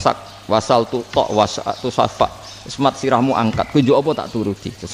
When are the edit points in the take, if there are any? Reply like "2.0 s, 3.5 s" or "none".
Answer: none